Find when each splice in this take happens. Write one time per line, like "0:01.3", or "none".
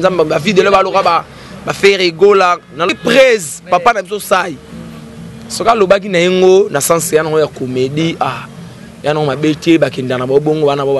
0:02.9